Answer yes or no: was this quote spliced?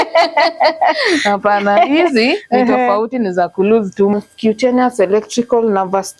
yes